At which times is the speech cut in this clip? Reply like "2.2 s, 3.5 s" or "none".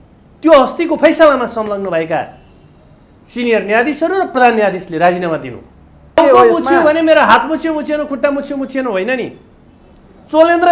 6.2 s